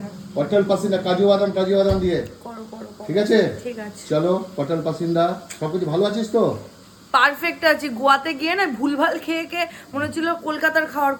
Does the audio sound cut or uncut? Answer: uncut